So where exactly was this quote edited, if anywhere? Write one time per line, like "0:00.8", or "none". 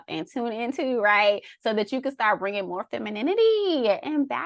none